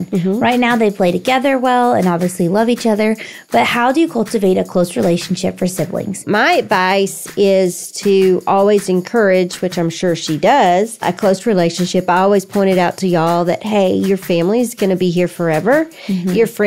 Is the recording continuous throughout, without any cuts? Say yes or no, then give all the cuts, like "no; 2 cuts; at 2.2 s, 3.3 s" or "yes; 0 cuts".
no; 3 cuts; at 6.2 s, 11.1 s, 14.2 s